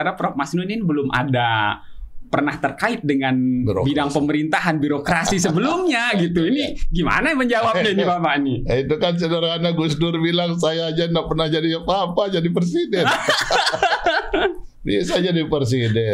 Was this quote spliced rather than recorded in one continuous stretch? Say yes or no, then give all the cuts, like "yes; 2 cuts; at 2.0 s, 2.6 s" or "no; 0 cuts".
no; 0 cuts